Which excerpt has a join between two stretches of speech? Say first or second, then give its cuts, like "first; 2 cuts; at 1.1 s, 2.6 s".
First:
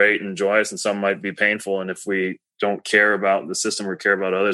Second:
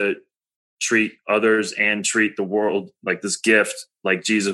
first; 1 cut; at 2.4 s